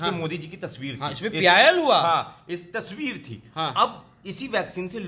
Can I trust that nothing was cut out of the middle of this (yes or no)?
yes